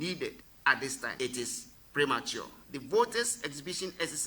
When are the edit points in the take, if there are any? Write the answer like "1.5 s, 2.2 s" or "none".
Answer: 1.0 s